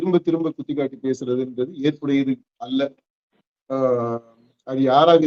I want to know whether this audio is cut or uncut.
uncut